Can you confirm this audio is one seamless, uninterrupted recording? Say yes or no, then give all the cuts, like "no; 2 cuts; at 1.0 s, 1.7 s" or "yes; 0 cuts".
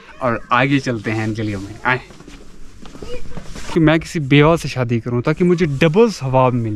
no; 1 cut; at 3.7 s